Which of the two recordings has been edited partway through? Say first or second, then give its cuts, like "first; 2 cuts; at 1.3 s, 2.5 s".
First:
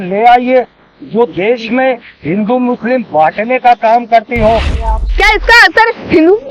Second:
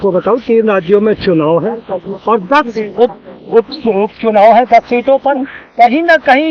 first; 1 cut; at 4.9 s